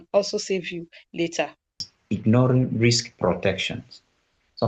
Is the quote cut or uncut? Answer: cut